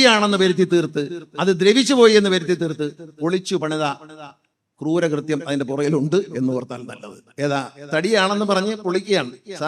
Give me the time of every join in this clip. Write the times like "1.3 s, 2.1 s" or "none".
none